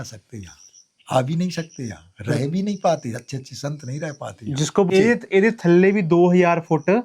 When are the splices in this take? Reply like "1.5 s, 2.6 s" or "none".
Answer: 4.9 s